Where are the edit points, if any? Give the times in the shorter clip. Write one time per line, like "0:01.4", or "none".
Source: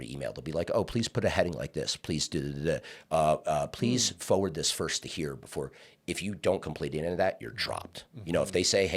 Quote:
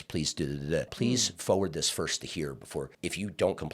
0:00.9
0:02.9